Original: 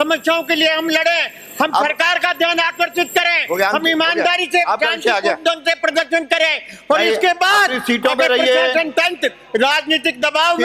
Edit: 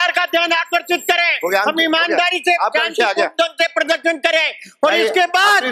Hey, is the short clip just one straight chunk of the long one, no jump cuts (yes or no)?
yes